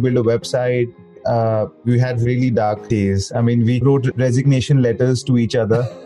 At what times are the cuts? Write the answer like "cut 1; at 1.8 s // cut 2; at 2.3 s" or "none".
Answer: cut 1; at 1.2 s // cut 2; at 2.8 s // cut 3; at 3.8 s